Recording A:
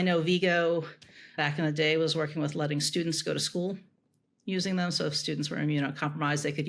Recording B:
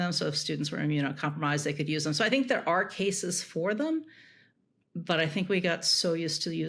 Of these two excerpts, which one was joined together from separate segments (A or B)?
A